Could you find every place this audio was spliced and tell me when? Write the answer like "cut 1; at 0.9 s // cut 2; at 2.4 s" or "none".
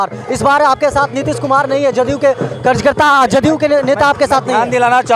none